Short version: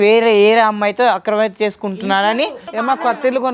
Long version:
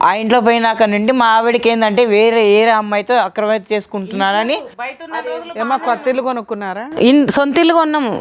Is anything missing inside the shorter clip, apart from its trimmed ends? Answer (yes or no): yes